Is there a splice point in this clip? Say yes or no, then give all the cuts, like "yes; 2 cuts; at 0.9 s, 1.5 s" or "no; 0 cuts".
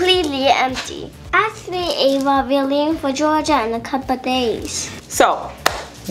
yes; 2 cuts; at 1.2 s, 5.0 s